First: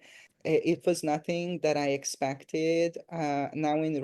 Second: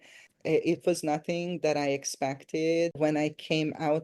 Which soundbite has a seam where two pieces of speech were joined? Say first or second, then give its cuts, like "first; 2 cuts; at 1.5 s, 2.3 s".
second; 1 cut; at 3.0 s